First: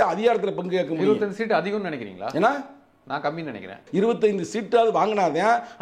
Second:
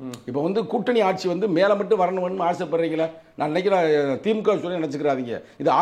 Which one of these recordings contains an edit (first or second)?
first